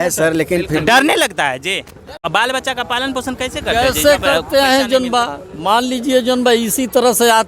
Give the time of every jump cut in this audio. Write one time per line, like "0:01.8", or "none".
0:02.1